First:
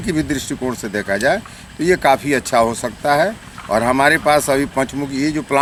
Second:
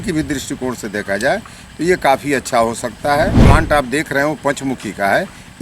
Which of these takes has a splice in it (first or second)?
second